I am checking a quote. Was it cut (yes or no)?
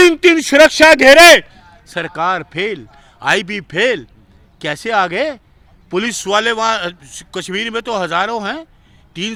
no